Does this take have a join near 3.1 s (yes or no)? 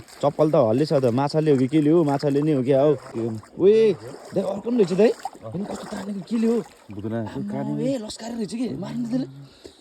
yes